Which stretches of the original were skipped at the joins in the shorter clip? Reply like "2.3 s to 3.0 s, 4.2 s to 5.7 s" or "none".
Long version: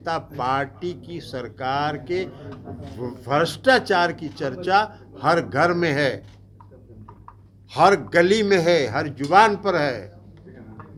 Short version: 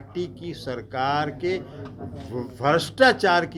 none